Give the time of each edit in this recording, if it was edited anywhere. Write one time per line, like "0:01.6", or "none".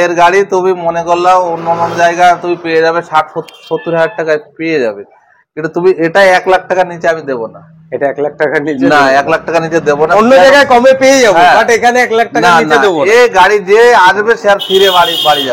none